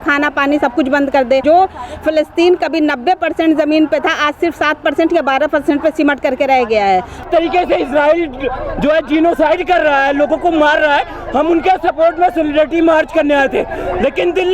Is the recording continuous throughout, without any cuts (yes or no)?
no